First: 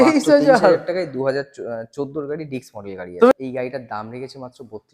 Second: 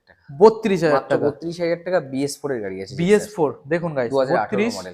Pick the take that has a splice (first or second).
first